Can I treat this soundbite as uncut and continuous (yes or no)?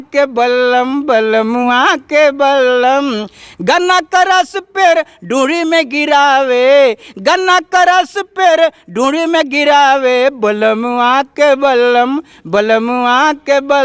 yes